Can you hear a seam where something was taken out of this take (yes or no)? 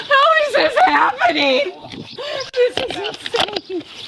yes